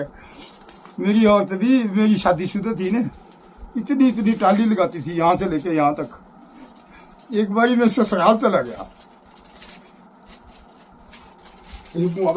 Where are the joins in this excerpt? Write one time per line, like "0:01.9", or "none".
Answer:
none